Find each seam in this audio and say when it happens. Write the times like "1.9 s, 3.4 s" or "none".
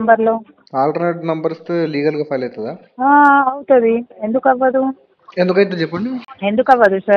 6.3 s